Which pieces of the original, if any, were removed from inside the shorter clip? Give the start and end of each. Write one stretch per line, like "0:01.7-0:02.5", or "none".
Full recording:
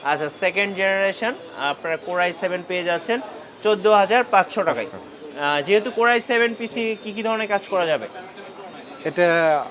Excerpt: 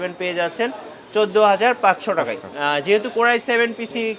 0:04.9-0:05.3

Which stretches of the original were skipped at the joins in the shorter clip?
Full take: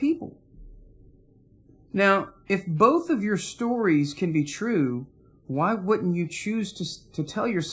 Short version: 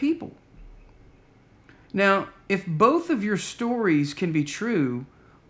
none

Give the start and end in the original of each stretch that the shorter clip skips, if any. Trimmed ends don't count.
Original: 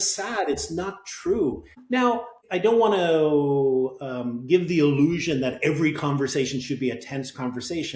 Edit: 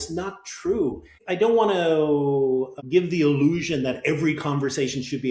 0:01.7-0:02.3
0:04.0-0:04.3

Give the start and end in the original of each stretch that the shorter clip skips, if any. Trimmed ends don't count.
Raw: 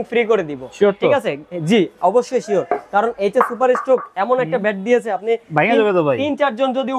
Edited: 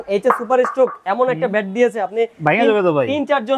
none

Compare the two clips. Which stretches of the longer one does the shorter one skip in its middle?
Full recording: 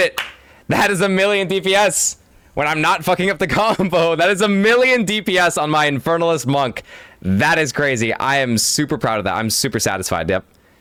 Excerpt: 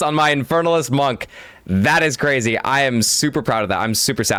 none

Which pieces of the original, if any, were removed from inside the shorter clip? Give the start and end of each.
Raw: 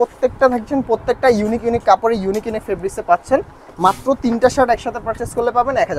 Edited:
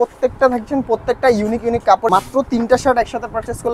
0:02.1-0:03.8

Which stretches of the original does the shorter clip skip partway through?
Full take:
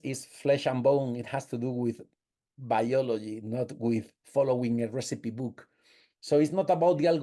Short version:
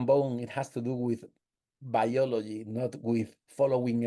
none

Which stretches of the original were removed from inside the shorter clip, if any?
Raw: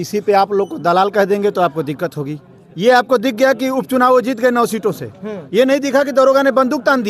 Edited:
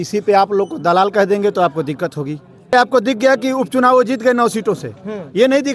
0:02.7-0:02.9

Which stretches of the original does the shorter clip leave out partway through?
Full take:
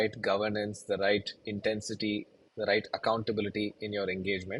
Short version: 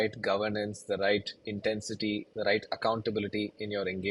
0:02.3-0:02.5

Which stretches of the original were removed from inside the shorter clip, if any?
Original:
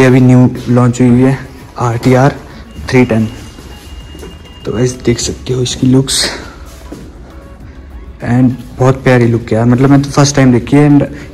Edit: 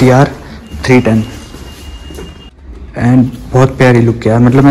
0:04.5-0:07.8

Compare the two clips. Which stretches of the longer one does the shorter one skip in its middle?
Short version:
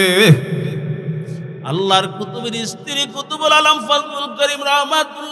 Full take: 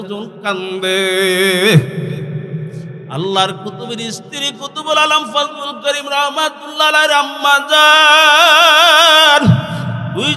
none

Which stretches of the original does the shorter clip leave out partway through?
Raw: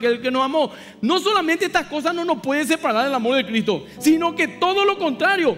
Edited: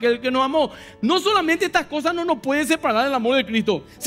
none

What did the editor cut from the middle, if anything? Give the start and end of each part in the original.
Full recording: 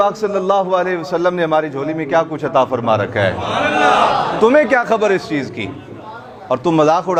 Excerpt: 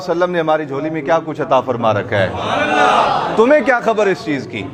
none

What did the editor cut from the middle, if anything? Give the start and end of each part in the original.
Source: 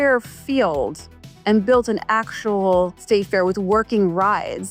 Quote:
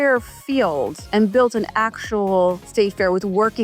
0:01.0-0:01.3

